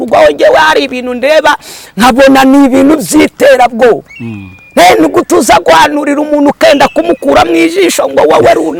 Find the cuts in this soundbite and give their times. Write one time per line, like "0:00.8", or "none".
none